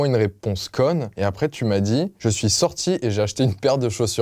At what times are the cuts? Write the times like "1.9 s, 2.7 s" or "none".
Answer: 1.1 s, 2.1 s